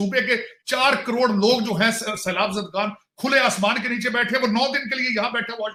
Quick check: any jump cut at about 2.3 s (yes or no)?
no